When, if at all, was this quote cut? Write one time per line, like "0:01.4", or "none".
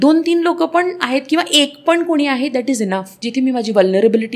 0:03.2